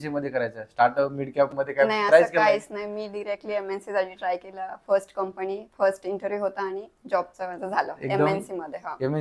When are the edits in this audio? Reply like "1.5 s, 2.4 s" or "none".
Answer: none